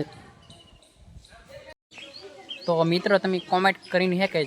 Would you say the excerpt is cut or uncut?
cut